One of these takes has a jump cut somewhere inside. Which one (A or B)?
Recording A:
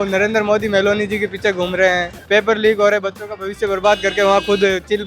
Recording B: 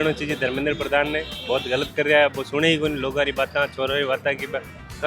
A